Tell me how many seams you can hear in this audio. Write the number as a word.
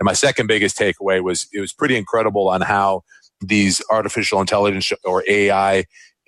zero